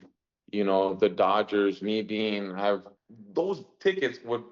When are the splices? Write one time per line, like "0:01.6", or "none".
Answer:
0:03.0